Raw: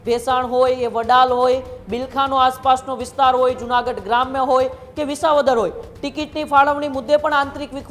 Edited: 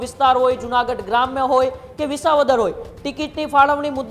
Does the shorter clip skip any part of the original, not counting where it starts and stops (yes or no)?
no